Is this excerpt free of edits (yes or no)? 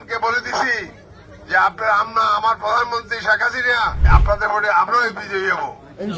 no